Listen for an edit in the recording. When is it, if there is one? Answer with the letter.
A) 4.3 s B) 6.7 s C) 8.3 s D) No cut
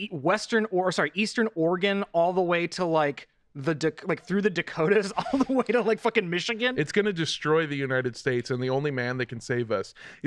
B